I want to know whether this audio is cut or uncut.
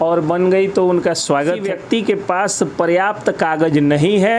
cut